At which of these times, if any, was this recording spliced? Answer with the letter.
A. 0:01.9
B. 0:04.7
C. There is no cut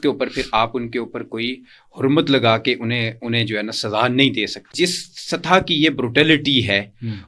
B